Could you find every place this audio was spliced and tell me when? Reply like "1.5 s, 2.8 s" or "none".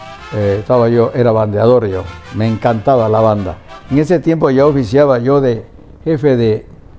none

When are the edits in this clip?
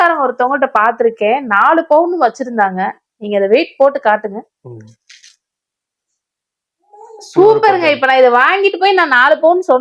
none

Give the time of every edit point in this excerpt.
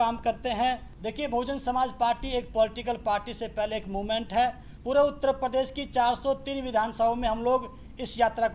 0.9 s, 4.7 s

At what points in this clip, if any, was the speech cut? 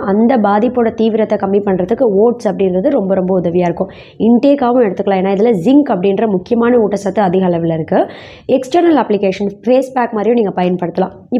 none

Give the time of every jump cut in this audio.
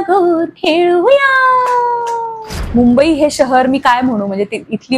2.5 s

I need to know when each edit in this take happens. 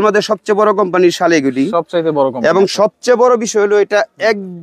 none

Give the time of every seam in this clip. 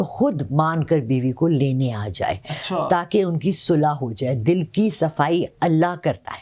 none

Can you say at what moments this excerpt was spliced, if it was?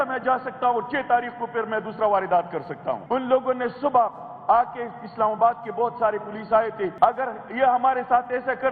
3.0 s, 6.9 s

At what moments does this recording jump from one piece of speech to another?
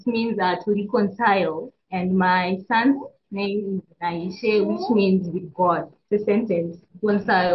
none

